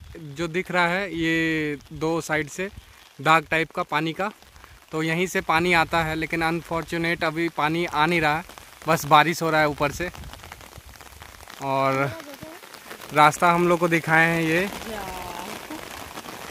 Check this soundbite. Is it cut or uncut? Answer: uncut